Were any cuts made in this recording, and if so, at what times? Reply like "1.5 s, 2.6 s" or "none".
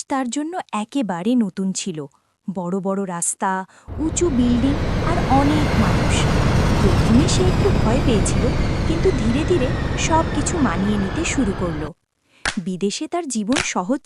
none